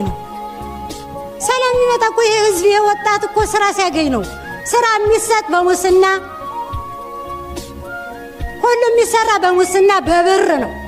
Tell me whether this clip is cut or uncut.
uncut